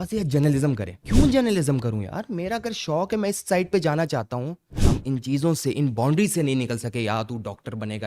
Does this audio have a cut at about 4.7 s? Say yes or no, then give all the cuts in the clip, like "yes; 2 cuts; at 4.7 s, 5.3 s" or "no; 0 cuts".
yes; 2 cuts; at 0.9 s, 4.7 s